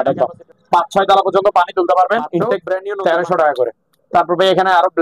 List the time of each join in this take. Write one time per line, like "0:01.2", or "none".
0:02.8